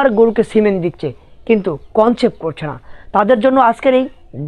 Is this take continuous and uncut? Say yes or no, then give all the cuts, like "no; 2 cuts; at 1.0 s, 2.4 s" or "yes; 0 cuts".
yes; 0 cuts